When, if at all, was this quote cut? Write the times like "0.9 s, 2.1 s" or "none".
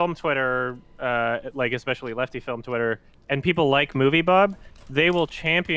none